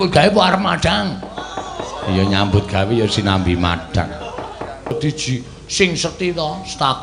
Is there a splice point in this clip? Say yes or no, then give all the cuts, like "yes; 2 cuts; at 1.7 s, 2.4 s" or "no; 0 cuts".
yes; 1 cut; at 4.9 s